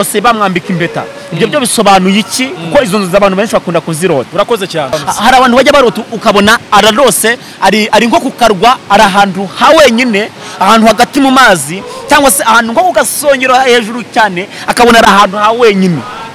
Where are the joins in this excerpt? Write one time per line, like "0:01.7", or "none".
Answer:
0:04.9